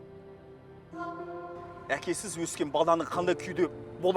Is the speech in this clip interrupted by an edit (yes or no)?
yes